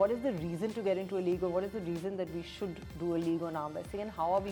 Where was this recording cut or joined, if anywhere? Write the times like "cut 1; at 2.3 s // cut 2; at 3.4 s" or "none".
none